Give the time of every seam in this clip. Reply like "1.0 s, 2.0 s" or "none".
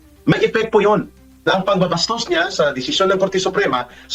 none